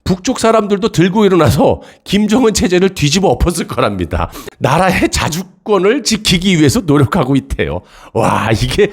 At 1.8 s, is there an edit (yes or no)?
no